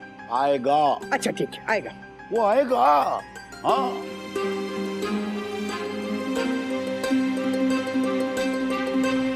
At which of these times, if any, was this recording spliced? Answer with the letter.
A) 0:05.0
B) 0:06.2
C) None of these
B